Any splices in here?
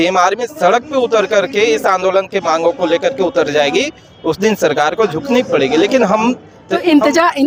no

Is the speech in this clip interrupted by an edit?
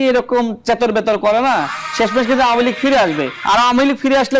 yes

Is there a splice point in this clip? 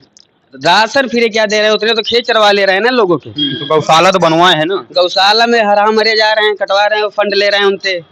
no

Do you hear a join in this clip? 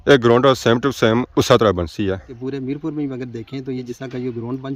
yes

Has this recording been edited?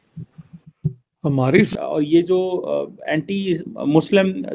yes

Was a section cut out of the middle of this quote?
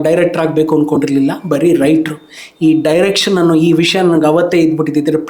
no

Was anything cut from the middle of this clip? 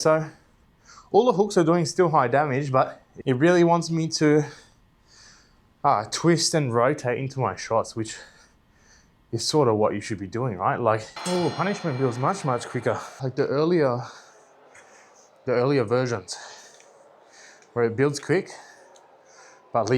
yes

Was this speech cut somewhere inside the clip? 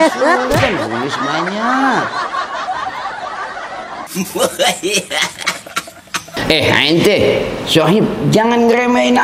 no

